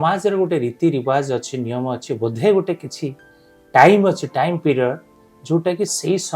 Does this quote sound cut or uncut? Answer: uncut